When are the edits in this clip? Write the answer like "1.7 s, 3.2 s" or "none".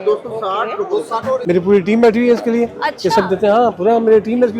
1.4 s